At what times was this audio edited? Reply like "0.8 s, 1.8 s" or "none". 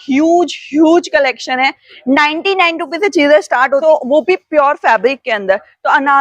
3.8 s